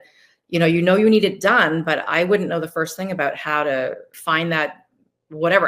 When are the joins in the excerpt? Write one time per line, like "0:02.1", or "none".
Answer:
0:04.2